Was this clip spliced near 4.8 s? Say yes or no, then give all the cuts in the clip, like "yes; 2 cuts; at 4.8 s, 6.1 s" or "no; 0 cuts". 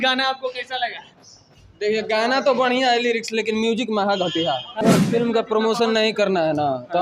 yes; 1 cut; at 4.8 s